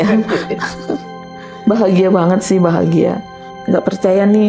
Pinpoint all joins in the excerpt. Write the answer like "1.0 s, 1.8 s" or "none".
3.5 s

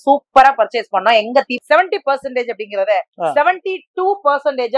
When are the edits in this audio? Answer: 1.5 s

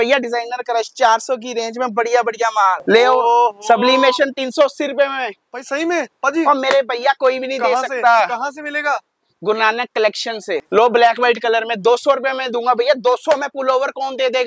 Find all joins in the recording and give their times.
2.8 s, 10.7 s

